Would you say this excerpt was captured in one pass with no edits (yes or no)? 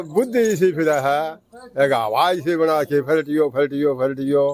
yes